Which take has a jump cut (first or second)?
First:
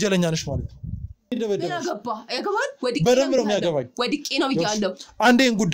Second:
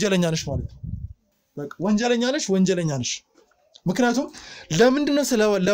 first